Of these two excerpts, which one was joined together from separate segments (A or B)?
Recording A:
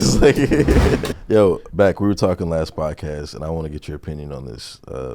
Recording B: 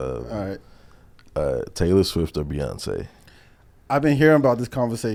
A